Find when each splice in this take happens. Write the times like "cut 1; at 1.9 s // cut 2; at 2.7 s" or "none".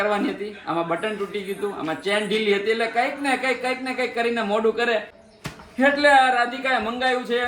cut 1; at 5.2 s